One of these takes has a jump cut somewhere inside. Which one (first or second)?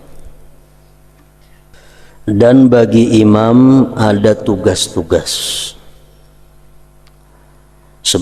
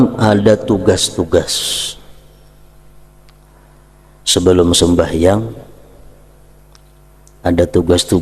first